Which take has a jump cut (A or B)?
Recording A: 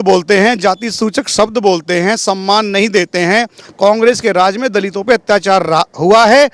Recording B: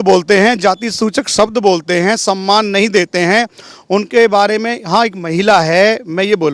A